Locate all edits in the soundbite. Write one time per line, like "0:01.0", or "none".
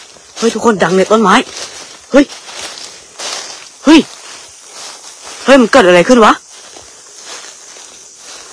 none